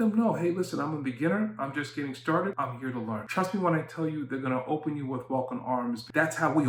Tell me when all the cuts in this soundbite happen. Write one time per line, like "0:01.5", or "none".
none